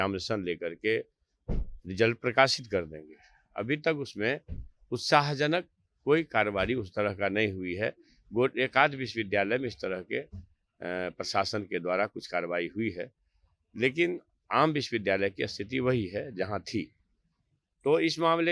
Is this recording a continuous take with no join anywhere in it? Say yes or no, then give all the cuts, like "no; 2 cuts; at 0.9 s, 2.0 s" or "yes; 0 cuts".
yes; 0 cuts